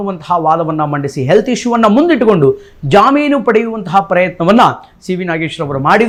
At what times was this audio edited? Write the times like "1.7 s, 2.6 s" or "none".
none